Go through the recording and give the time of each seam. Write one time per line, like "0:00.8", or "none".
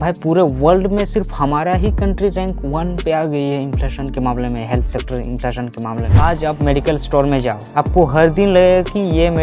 0:06.1